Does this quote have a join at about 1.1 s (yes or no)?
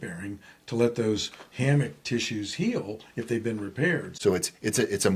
no